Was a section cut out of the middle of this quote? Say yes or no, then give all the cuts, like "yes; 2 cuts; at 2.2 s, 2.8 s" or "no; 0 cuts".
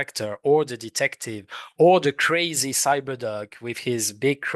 no; 0 cuts